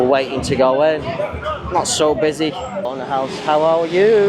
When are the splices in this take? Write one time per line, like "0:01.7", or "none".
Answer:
0:02.9